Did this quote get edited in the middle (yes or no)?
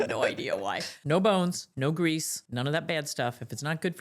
yes